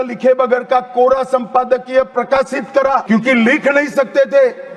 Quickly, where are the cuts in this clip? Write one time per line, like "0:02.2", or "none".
0:03.0

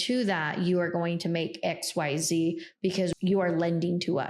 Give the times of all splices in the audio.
0:03.1

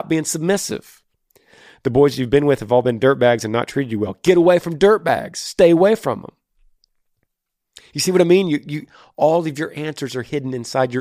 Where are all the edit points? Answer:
none

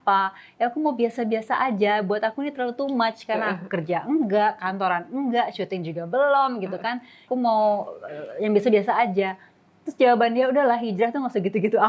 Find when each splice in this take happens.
none

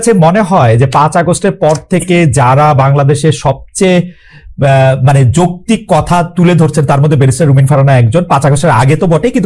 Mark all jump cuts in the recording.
none

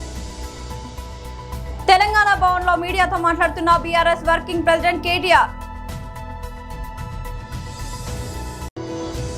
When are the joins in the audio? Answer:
none

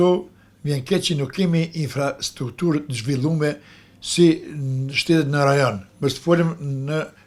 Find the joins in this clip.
none

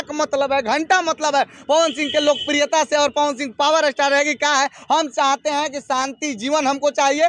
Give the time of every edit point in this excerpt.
none

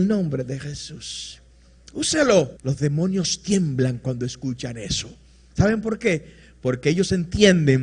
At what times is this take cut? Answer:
0:02.6

